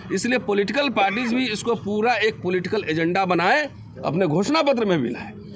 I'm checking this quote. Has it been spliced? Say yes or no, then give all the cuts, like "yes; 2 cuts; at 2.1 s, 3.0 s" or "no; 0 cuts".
no; 0 cuts